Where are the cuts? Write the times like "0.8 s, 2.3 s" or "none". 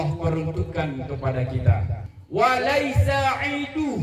1.9 s